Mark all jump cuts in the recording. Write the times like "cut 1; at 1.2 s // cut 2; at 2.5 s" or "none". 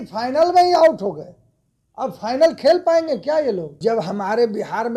cut 1; at 3.7 s